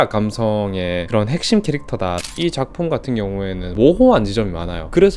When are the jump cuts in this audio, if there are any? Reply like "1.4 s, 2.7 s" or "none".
2.3 s, 3.7 s